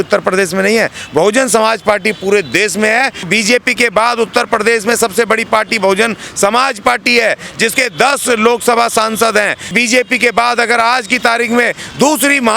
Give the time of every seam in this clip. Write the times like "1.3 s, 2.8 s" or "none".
3.2 s, 9.7 s